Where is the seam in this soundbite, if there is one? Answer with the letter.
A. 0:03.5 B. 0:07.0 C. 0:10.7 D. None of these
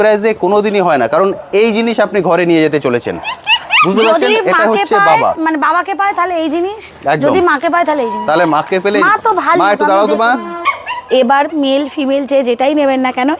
C